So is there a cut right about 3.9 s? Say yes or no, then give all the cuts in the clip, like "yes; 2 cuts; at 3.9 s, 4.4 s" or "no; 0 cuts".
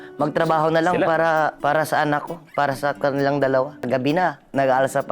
yes; 2 cuts; at 1.6 s, 3.9 s